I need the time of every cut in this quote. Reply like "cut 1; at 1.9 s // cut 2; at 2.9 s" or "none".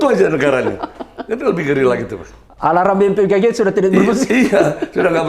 none

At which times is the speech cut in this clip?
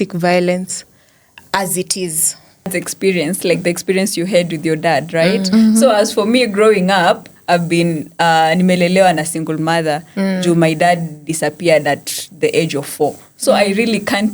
cut 1; at 2.7 s

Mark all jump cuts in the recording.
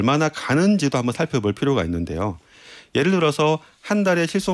none

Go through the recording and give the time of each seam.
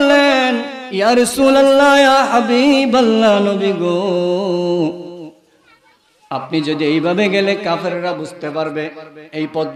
none

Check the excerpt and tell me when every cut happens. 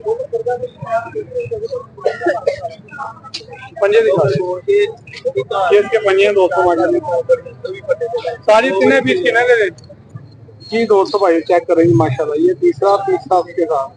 none

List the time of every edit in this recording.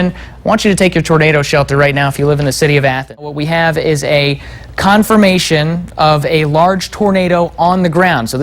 cut 1; at 3.2 s

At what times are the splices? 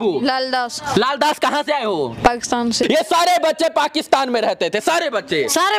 cut 1; at 2.8 s

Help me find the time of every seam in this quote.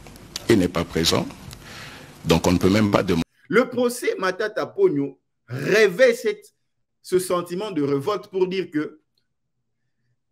cut 1; at 3.2 s

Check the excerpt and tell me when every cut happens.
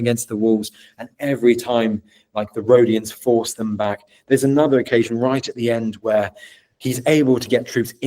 none

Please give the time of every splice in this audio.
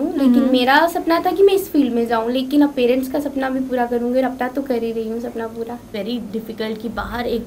cut 1; at 5.8 s

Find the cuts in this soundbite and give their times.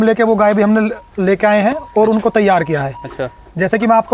none

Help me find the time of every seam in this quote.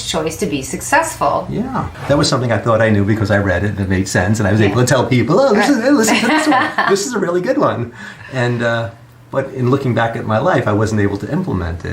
cut 1; at 1.9 s

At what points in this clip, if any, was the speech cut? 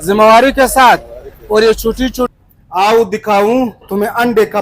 cut 1; at 2.3 s

